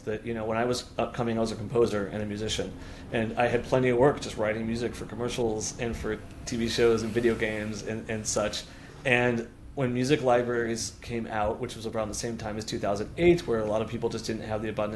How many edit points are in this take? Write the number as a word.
zero